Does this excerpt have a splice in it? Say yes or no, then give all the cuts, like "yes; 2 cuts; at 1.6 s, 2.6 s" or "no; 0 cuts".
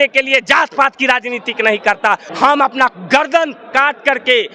yes; 1 cut; at 2.3 s